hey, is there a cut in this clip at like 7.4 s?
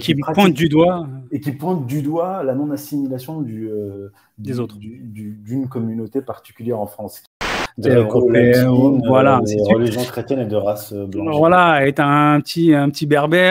yes; 1 cut; at 7.4 s

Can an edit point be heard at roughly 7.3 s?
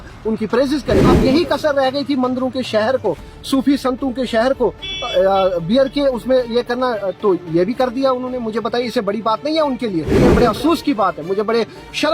no; 2 cuts; at 1.1 s, 10.2 s

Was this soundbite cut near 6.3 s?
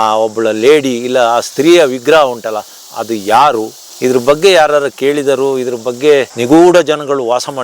yes; 1 cut; at 6.3 s

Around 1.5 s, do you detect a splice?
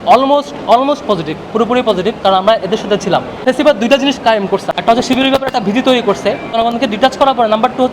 no; 3 cuts; at 3.4 s, 4.7 s, 6.6 s

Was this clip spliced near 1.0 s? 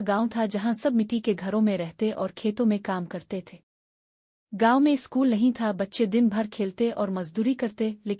yes; 1 cut; at 1.0 s

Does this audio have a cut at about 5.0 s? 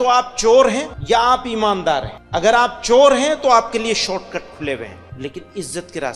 yes; 3 cuts; at 0.9 s, 2.2 s, 5.0 s

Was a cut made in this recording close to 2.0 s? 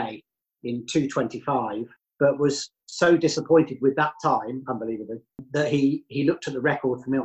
yes; 2 cuts; at 2.0 s, 5.5 s

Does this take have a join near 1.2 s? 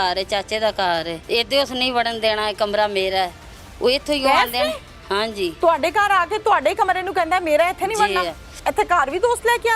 yes; 2 cuts; at 1.2 s, 8.6 s

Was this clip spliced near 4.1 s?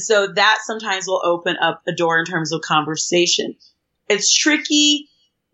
no; 0 cuts

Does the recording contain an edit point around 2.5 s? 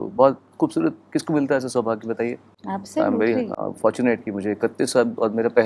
no; 0 cuts

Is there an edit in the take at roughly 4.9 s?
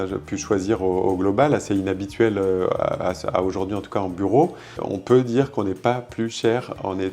yes; 1 cut; at 4.9 s

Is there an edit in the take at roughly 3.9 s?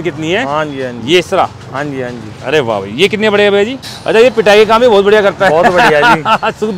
yes; 1 cut; at 3.9 s

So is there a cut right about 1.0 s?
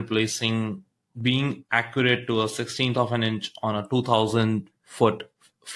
yes; 1 cut; at 1.0 s

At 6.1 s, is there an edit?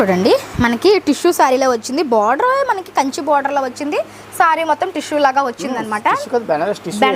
no; 0 cuts

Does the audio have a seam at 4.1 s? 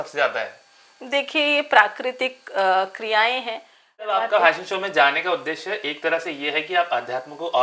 yes; 1 cut; at 4.1 s

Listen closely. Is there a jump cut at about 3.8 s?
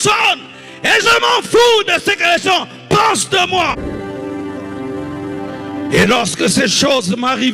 yes; 1 cut; at 3.8 s

